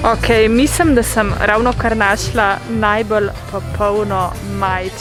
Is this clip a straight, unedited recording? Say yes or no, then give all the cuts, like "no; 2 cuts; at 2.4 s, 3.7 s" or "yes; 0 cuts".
yes; 0 cuts